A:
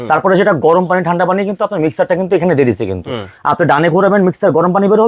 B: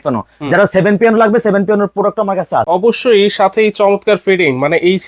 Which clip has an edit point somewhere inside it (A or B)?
B